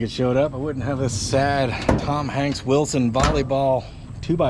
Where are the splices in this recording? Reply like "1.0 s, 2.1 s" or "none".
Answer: none